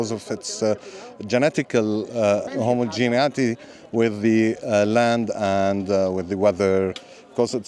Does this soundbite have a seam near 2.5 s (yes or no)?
yes